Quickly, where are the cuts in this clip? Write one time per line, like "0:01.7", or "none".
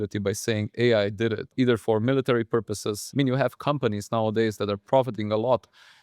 0:03.0